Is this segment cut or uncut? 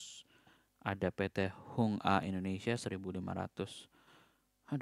uncut